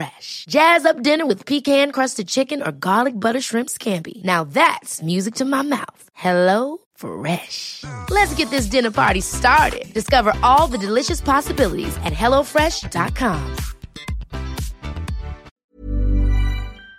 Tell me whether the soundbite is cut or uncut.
cut